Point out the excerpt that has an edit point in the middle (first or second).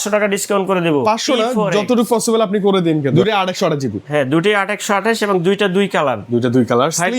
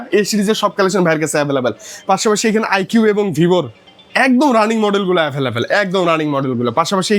first